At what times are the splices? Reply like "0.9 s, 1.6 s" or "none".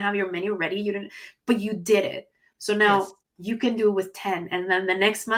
none

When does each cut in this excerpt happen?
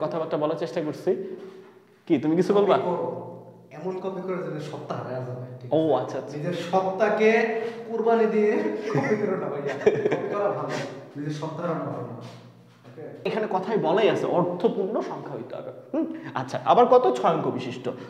13.3 s

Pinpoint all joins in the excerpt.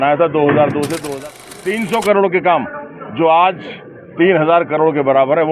1.0 s

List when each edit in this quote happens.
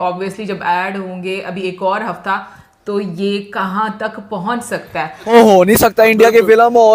5.3 s

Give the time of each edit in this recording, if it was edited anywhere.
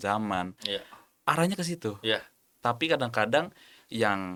none

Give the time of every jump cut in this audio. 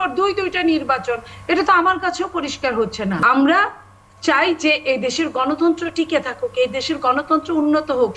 3.2 s

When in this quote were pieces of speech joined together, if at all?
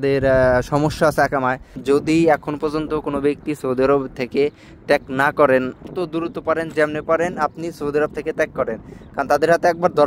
1.8 s, 5.9 s

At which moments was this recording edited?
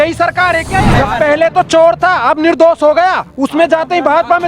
0.9 s

